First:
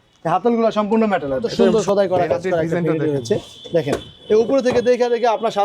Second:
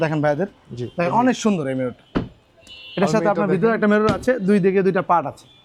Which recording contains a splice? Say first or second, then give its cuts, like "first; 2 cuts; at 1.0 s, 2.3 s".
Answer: first; 1 cut; at 1.6 s